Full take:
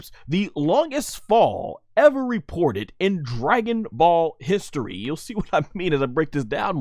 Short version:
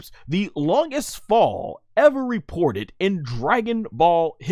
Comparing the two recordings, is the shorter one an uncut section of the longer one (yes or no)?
yes